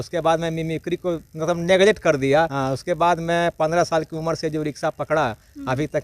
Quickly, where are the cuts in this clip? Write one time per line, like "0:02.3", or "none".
0:02.6